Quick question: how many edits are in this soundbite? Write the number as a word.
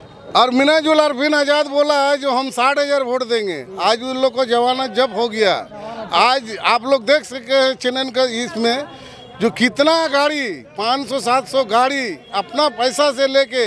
zero